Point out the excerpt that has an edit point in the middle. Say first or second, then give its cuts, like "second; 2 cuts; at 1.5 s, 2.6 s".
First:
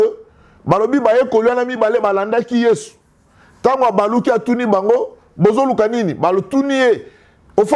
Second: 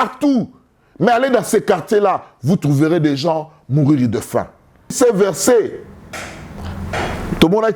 second; 1 cut; at 4.9 s